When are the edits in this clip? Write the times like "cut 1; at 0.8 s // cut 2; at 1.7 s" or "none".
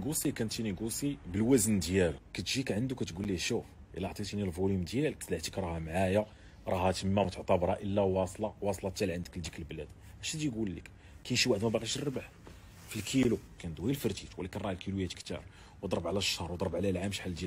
cut 1; at 2.3 s // cut 2; at 5.2 s // cut 3; at 13.6 s